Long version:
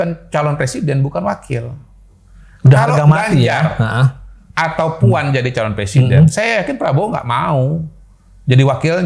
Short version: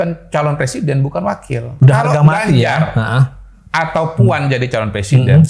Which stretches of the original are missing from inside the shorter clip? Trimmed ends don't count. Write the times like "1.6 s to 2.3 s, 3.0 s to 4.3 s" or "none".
1.7 s to 2.5 s

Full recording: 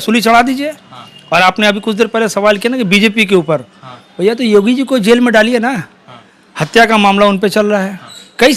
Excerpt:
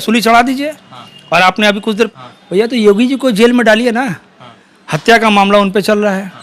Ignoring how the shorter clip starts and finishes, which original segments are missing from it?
2.1 s to 3.8 s

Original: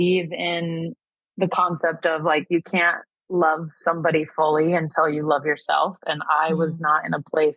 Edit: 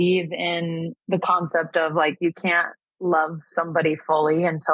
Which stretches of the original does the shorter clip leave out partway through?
0.9 s to 1.2 s

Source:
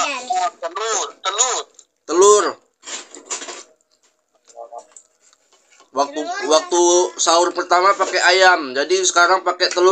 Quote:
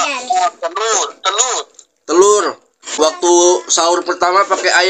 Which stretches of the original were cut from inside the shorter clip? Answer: 2.9 s to 6.4 s

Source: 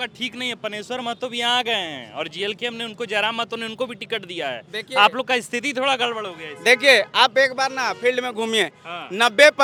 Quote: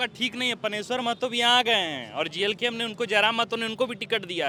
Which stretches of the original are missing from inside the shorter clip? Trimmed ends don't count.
none

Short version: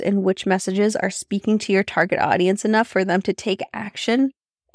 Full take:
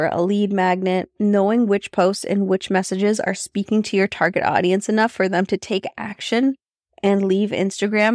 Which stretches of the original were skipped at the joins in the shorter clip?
none

